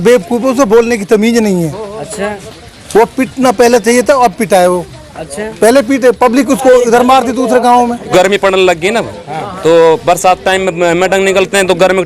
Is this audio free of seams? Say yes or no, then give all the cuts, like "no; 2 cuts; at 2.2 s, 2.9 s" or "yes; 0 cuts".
no; 1 cut; at 8.1 s